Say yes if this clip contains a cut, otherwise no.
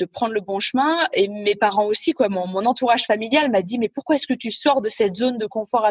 no